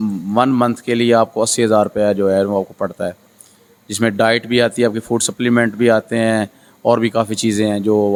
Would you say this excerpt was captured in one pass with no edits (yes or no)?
yes